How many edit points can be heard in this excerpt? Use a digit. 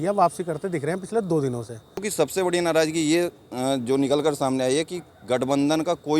1